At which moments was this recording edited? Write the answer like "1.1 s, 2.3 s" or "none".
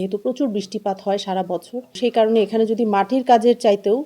1.9 s